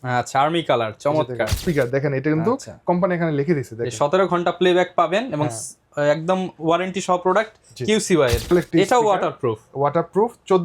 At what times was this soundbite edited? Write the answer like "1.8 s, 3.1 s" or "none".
1.6 s, 8.5 s